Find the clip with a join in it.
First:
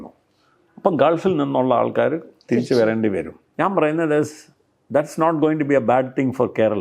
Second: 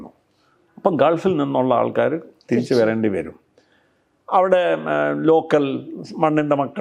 first; 1 cut; at 3.4 s

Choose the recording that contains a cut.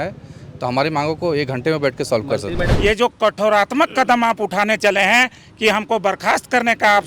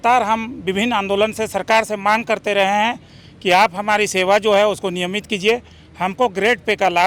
first; 1 cut; at 2.7 s

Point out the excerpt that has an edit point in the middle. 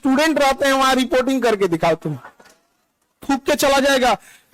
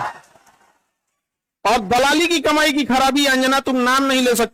first; 1 cut; at 3.2 s

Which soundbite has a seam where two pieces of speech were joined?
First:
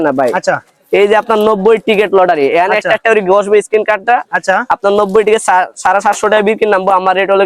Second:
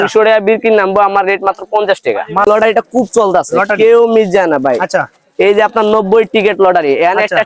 second; 1 cut; at 2.5 s

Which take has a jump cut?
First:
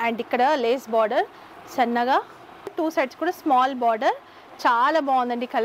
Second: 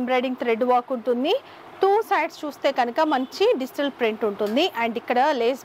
first; 1 cut; at 2.7 s

